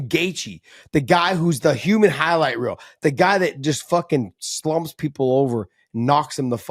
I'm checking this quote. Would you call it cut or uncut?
uncut